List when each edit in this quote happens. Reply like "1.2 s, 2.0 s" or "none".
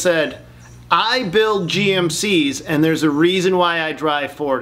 none